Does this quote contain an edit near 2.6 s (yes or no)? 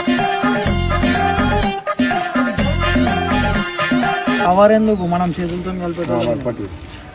no